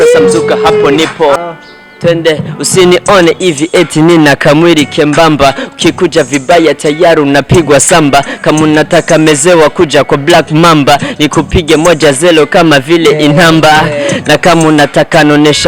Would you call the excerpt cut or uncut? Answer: cut